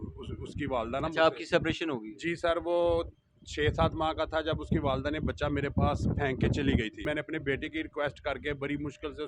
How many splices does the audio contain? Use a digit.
1